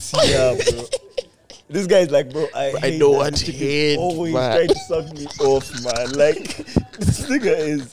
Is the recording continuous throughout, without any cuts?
yes; 0 cuts

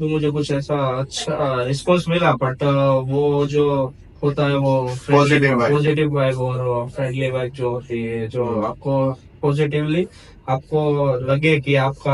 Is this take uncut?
yes; 0 cuts

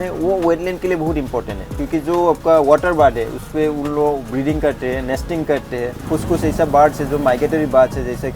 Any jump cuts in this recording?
yes; 1 cut; at 6.1 s

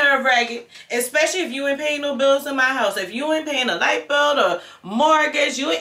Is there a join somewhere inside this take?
no; 0 cuts

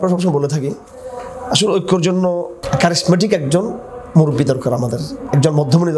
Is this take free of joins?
no; 1 cut; at 2.6 s

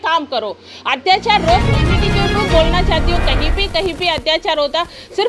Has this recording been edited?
yes; 1 cut; at 1.9 s

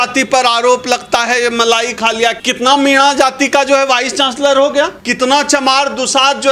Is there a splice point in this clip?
yes; 2 cuts; at 2.4 s, 5.0 s

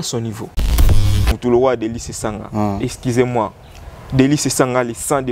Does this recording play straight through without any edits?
no; 1 cut; at 0.9 s

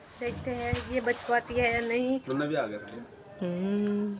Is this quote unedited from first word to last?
no; 1 cut; at 2.2 s

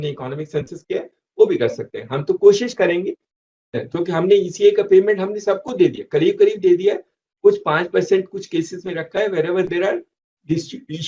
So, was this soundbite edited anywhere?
yes; 1 cut; at 3.8 s

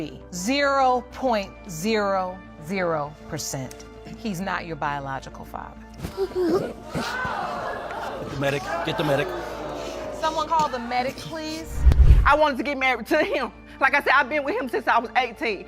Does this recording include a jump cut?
yes; 1 cut; at 12.1 s

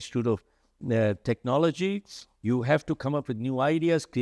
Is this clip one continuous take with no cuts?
yes; 0 cuts

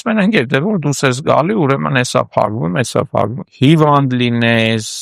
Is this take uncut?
no; 1 cut; at 3.4 s

